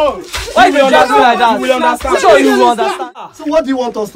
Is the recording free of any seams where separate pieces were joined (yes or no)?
no